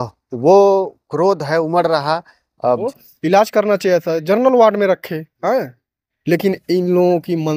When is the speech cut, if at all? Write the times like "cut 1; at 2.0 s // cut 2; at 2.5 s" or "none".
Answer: cut 1; at 2.9 s